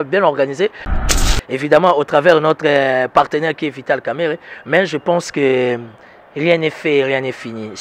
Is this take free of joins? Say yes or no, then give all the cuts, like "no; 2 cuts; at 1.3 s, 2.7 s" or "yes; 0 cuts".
no; 1 cut; at 1.0 s